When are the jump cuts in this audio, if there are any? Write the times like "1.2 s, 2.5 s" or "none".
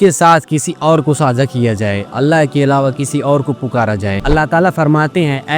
4.2 s